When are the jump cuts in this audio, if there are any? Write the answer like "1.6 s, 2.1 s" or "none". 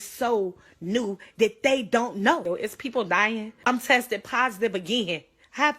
2.4 s, 3.7 s

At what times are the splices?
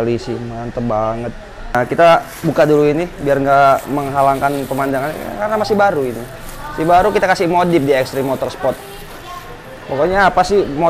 1.7 s

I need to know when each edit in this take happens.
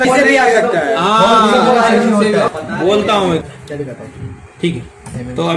2.5 s

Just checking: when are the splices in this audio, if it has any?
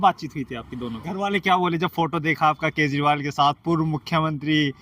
1.1 s

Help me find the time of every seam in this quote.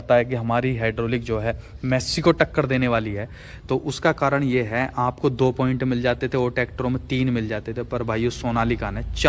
none

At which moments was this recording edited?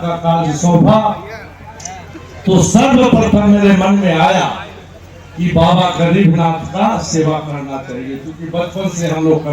none

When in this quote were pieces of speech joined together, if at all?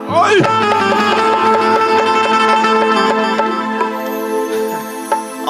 none

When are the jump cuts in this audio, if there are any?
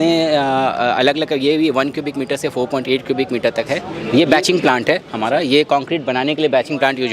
3.9 s

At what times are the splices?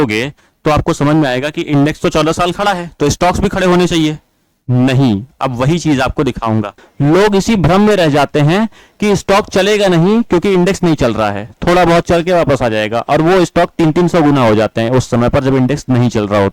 6.8 s

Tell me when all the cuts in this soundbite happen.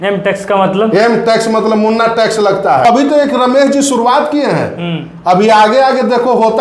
2.8 s

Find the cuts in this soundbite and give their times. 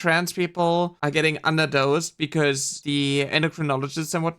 1.0 s, 2.8 s

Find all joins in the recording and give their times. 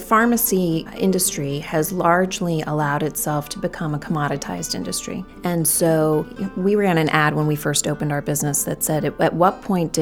0.9 s, 5.3 s, 6.4 s

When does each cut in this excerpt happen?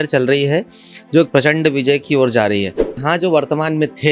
3.0 s

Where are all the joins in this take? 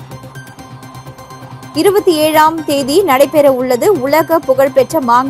1.2 s

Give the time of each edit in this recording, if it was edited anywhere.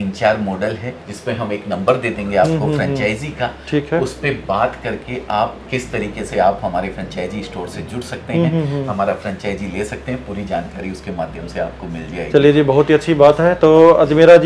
none

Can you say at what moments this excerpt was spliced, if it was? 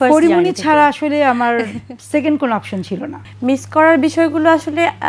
3.2 s

